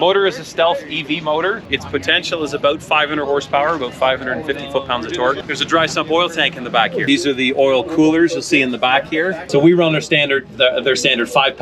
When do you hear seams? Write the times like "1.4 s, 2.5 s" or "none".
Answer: 1.7 s, 5.4 s, 7.0 s, 9.4 s